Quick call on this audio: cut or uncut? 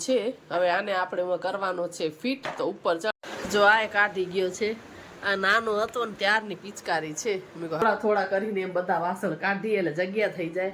cut